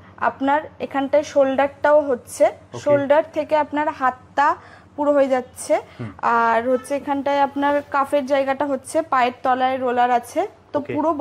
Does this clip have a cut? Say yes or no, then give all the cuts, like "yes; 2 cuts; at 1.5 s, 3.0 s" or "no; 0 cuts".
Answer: no; 0 cuts